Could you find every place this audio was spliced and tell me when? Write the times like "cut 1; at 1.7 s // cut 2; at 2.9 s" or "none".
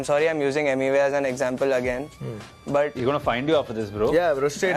none